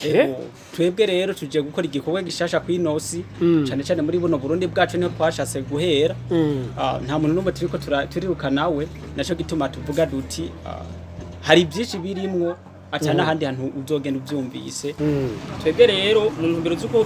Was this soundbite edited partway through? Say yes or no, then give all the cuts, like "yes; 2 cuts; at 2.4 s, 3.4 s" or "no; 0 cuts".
yes; 1 cut; at 14.9 s